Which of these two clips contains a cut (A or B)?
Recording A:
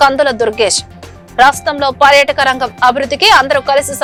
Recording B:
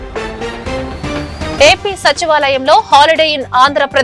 B